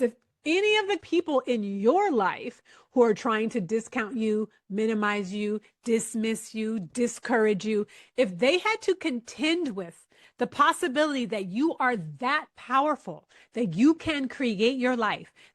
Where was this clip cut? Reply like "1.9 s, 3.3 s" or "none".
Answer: 1.0 s